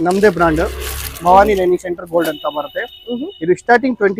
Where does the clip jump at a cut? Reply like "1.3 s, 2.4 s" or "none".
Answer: none